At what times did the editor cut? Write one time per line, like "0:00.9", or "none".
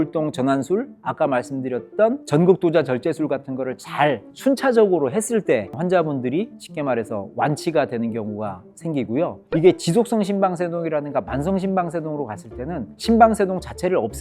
none

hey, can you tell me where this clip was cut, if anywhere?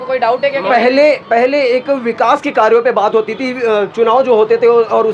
none

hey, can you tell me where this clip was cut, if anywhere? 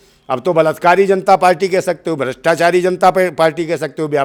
none

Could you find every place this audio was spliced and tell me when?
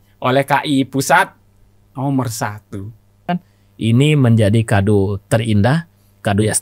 0:03.2

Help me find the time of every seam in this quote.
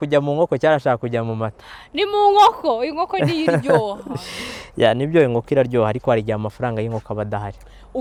none

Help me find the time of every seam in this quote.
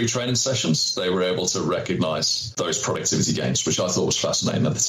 0:02.4

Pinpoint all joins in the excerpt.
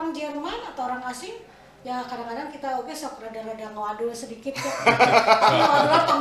none

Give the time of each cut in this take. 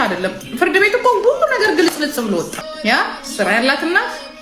0:02.6

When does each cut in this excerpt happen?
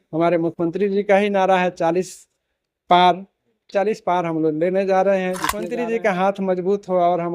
0:05.5

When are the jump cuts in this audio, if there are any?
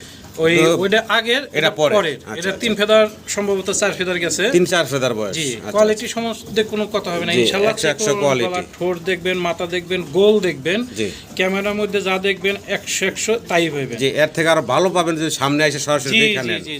none

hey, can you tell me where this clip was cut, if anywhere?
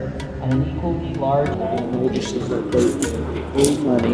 0:01.5

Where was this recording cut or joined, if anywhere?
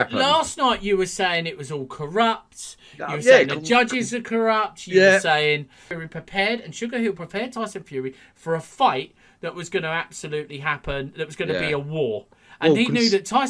0:06.0

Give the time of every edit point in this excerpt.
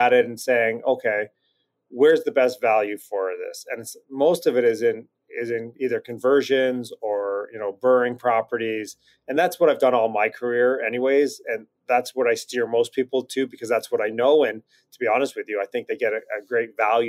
none

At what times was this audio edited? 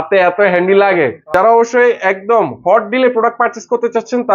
0:01.2

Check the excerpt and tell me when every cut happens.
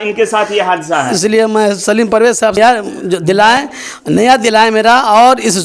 0:02.4

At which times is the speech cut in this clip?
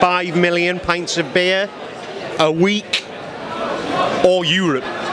none

